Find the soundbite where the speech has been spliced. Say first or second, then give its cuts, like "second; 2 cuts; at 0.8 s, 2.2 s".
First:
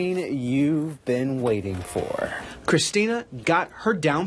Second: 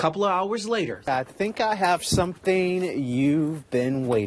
second; 1 cut; at 1.1 s